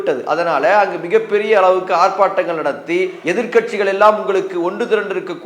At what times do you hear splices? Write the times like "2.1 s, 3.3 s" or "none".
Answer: 3.2 s